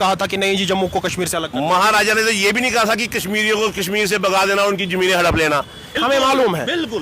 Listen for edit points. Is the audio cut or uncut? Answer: cut